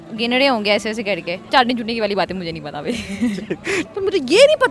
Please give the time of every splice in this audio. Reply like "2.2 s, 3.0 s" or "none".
1.4 s, 3.8 s